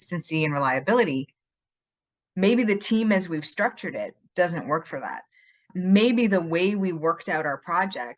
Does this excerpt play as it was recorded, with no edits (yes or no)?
no